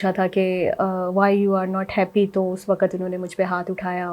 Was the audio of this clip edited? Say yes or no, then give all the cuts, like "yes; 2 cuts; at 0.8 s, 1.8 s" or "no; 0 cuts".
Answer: no; 0 cuts